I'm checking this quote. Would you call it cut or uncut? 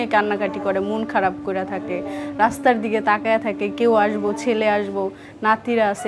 uncut